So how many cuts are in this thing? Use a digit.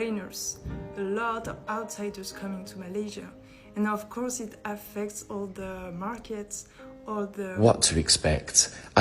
1